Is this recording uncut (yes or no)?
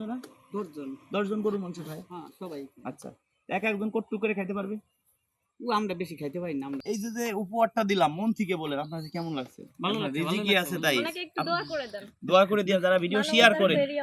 no